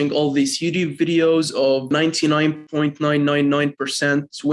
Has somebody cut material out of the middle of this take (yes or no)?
no